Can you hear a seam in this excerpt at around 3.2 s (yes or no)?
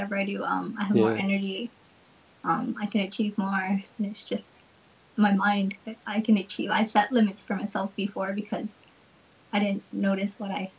no